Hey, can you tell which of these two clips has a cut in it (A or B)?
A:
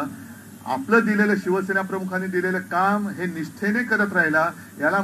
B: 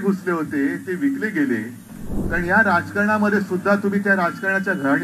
B